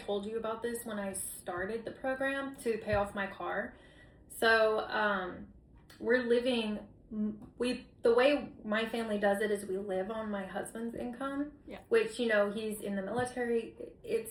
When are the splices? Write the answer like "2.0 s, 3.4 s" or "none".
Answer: none